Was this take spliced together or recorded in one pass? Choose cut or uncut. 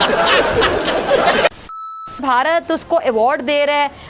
cut